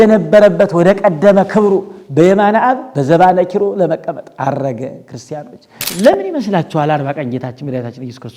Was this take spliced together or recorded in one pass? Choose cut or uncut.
cut